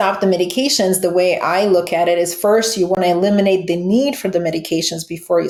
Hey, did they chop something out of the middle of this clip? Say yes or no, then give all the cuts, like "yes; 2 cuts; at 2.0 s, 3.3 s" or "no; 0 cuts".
no; 0 cuts